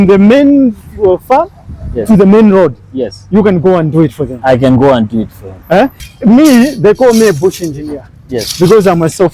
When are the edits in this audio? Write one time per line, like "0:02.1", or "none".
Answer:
0:06.0